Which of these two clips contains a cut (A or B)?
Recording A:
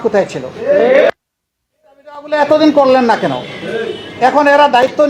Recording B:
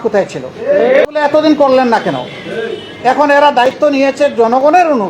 B